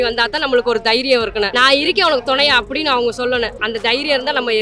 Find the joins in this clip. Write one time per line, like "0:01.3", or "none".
0:01.5
0:03.6